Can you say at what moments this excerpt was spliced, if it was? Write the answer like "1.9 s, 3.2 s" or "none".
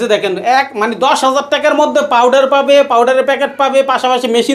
none